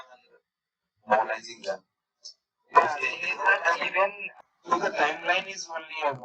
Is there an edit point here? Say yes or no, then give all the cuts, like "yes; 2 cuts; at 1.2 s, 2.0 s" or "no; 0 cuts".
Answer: yes; 1 cut; at 4.2 s